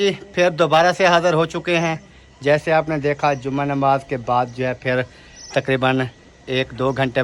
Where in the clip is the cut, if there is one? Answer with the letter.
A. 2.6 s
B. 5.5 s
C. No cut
C